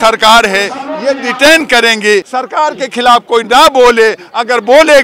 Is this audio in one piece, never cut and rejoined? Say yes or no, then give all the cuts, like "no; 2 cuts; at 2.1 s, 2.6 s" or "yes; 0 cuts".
no; 1 cut; at 2.3 s